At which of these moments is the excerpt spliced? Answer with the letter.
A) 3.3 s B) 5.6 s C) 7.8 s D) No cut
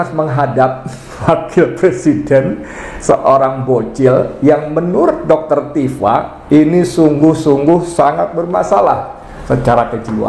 D